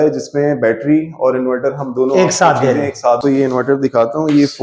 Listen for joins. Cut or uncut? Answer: cut